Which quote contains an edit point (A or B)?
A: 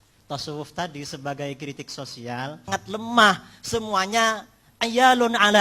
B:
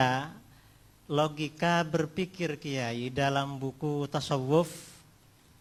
A